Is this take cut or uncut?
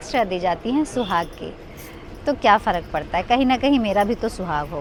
uncut